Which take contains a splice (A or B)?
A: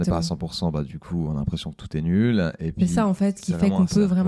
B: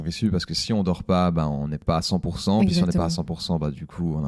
B